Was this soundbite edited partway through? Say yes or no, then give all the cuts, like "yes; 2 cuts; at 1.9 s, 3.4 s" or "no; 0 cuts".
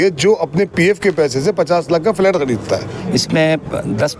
yes; 1 cut; at 2.9 s